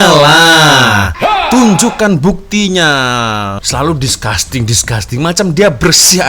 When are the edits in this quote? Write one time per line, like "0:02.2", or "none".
0:03.6